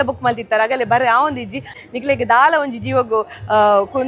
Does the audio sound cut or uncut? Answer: cut